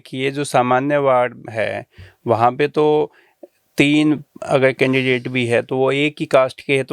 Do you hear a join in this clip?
no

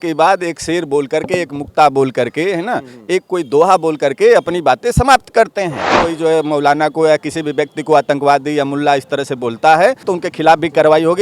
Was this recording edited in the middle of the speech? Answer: yes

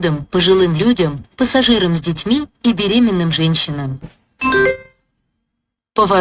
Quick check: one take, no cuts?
no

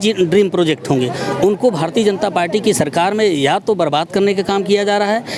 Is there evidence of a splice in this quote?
no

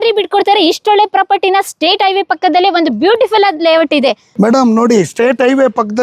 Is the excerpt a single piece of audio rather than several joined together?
no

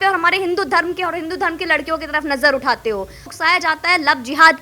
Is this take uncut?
no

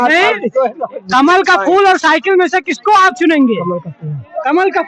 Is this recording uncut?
yes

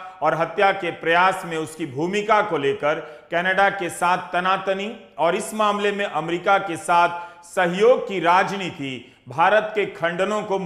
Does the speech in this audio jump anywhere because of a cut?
no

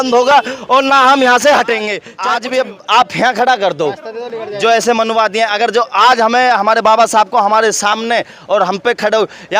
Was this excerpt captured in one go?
no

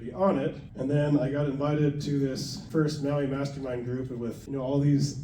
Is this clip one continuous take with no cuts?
no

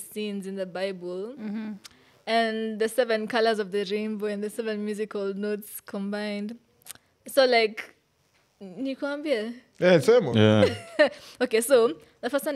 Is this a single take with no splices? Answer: yes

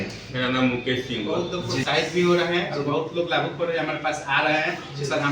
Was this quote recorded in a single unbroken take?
no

